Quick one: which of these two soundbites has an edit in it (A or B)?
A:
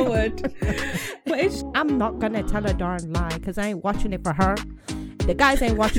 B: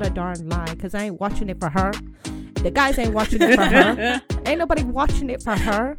A